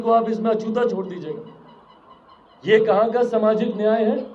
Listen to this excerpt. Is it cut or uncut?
uncut